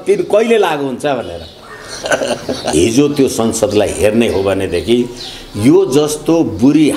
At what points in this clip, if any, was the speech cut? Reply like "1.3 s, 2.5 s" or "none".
2.6 s